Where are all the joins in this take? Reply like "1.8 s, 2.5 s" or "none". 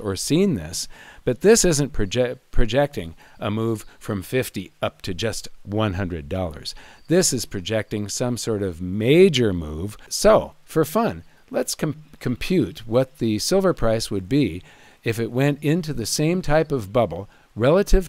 10.1 s